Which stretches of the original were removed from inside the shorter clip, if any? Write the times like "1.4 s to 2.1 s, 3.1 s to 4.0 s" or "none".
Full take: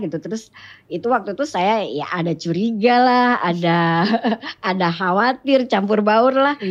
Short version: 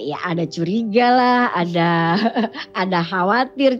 none